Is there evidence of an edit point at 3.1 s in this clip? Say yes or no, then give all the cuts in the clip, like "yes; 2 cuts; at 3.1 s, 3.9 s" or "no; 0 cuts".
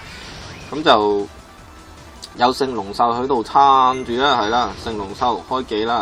yes; 1 cut; at 3.1 s